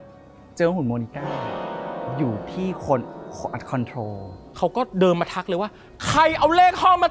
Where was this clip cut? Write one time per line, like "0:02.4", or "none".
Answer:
0:04.4